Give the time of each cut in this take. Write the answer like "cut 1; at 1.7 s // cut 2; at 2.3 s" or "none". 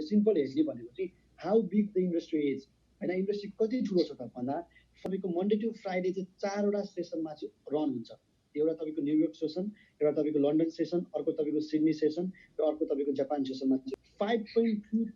cut 1; at 5.0 s // cut 2; at 13.9 s

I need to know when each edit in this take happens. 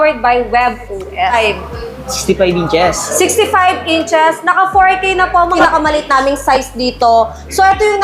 cut 1; at 1.3 s // cut 2; at 5.6 s

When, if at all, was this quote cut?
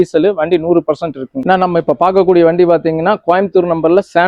none

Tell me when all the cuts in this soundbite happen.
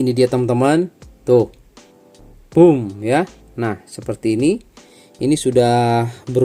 none

